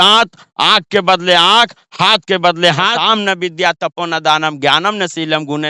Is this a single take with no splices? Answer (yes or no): no